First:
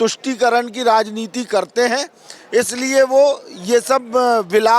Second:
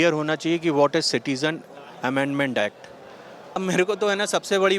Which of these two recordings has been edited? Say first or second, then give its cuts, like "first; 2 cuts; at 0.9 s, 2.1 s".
second; 1 cut; at 3.6 s